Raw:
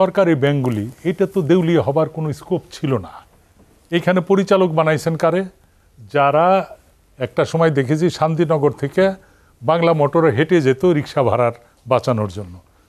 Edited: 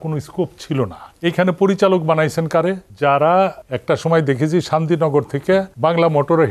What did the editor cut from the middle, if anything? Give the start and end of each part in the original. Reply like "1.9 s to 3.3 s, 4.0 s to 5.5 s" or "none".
3.2 s to 3.7 s, 5.6 s to 6.0 s, 6.8 s to 7.2 s, 9.2 s to 9.6 s